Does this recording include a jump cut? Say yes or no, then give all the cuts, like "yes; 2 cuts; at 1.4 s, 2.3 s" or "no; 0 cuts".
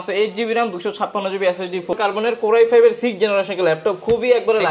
yes; 1 cut; at 1.9 s